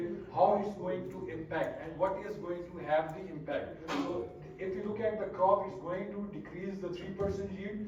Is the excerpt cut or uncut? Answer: uncut